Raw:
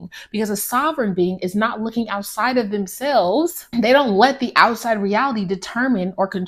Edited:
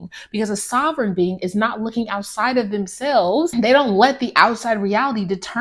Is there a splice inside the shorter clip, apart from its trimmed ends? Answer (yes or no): yes